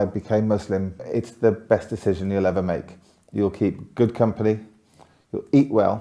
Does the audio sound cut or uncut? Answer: cut